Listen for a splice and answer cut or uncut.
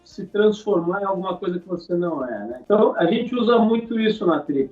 cut